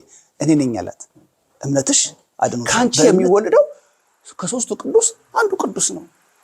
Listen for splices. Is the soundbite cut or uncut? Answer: cut